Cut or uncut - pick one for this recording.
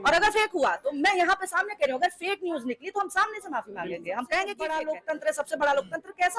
cut